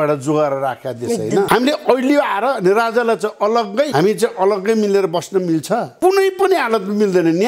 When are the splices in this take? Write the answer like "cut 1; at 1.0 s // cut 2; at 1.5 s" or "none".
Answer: cut 1; at 1.5 s // cut 2; at 3.9 s // cut 3; at 5.9 s